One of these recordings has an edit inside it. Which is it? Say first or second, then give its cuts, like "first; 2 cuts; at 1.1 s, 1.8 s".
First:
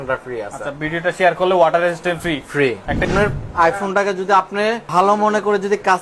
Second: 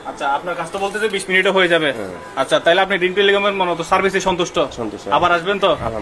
first; 2 cuts; at 2.8 s, 4.8 s